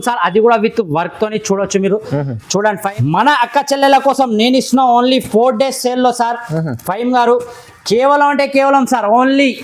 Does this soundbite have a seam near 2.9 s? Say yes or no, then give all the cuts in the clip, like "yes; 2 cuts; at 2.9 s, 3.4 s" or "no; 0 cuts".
yes; 1 cut; at 2.9 s